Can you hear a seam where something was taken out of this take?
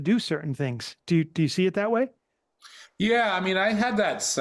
no; 0 cuts

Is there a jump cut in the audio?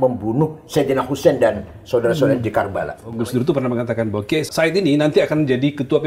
yes; 2 cuts; at 3.0 s, 4.5 s

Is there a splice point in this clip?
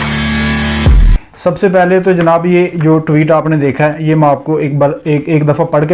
yes; 1 cut; at 1.1 s

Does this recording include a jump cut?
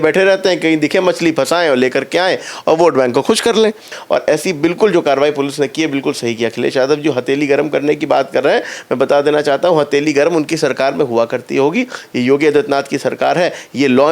yes; 1 cut; at 3.9 s

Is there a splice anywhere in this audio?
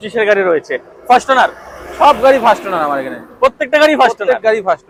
no; 0 cuts

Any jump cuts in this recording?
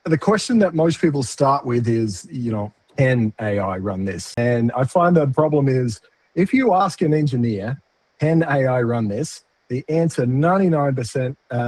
yes; 1 cut; at 4.2 s

